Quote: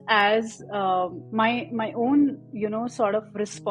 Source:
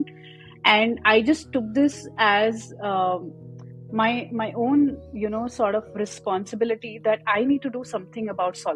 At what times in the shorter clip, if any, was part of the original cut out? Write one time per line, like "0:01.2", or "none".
0:01.2